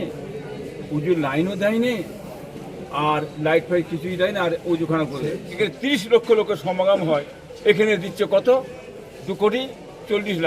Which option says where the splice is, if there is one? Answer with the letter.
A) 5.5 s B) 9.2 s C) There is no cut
A